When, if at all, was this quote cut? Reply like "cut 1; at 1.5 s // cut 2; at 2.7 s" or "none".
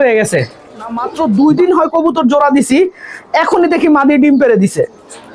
cut 1; at 1.0 s